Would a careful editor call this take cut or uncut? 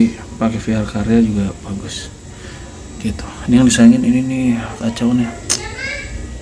uncut